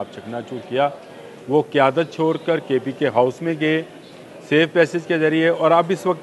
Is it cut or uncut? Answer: uncut